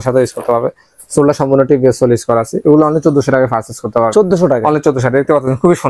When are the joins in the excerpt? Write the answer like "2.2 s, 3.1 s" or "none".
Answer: none

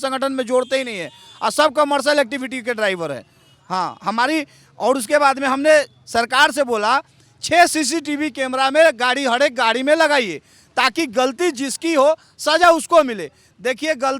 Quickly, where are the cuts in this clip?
none

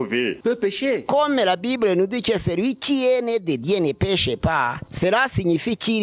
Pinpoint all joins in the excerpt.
1.0 s

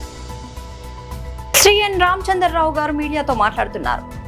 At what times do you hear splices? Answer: 1.2 s

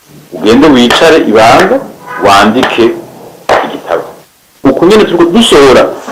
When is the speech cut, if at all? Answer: 4.6 s

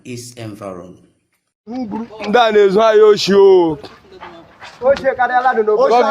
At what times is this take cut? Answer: 1.6 s

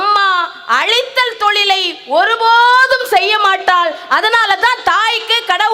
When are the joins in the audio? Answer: none

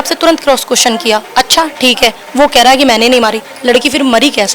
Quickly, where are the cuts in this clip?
none

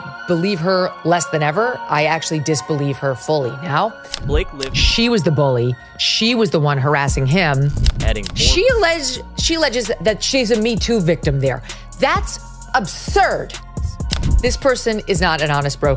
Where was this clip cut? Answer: 4.3 s, 7.9 s, 14.0 s

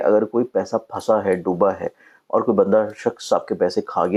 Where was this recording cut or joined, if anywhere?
none

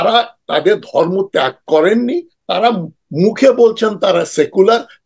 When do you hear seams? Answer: none

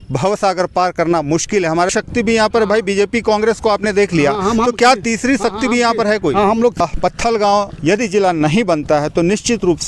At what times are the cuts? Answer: 1.9 s, 6.8 s

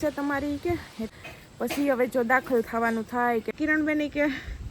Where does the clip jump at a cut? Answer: 1.1 s, 3.5 s

